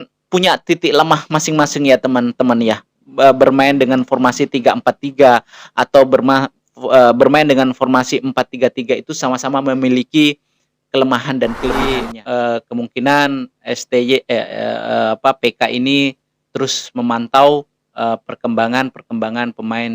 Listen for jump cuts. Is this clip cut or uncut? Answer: cut